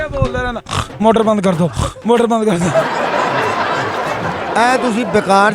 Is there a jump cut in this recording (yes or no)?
yes